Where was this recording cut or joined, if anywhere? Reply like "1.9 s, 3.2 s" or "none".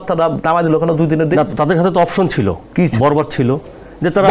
none